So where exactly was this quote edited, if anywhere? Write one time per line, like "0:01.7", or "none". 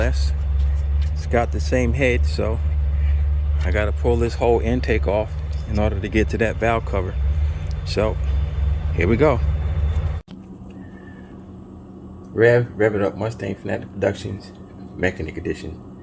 0:10.3

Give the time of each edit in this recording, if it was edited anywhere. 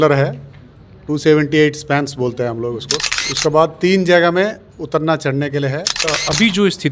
0:03.0
0:06.0

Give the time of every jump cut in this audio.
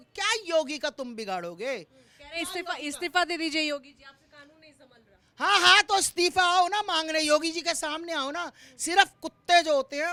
none

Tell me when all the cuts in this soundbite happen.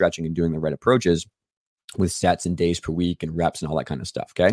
none

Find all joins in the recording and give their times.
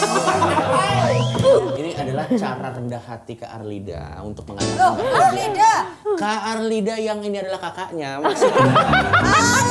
0:01.7

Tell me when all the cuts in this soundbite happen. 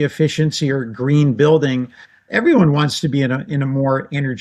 0:02.2

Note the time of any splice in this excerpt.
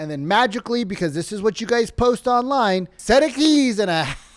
0:02.9

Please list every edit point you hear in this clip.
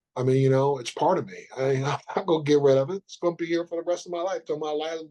none

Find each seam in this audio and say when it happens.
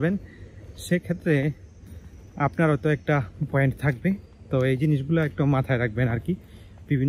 none

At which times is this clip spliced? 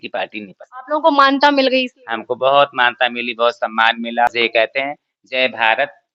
0:04.7

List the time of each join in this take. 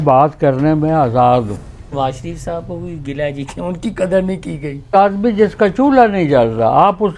0:01.9
0:04.9

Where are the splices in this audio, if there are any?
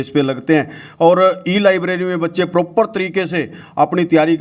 none

